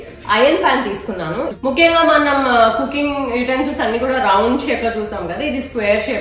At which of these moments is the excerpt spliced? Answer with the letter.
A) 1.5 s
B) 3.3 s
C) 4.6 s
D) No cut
A